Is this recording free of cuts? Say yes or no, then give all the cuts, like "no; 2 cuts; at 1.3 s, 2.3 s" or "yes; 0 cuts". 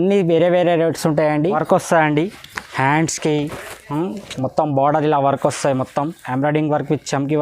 no; 1 cut; at 1.6 s